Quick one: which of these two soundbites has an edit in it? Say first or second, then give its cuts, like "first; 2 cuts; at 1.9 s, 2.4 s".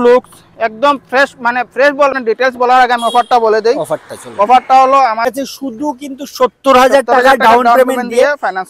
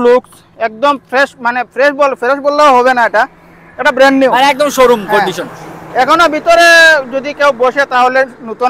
first; 2 cuts; at 2.2 s, 5.3 s